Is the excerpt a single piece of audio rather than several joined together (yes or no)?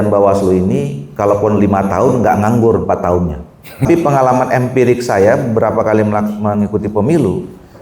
no